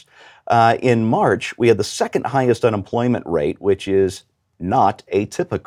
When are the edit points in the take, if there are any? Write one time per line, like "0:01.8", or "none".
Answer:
none